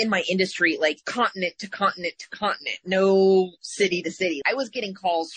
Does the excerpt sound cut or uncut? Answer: cut